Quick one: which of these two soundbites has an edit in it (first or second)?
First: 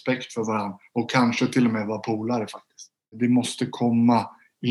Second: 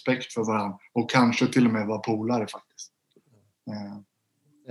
first